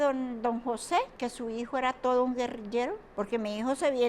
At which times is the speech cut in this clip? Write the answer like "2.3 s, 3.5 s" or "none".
1.1 s, 3.0 s